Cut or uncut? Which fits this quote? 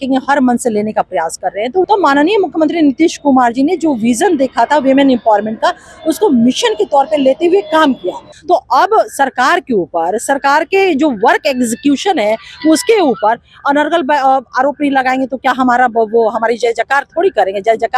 cut